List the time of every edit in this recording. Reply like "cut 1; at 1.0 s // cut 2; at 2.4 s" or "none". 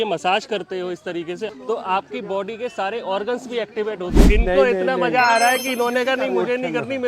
cut 1; at 4.4 s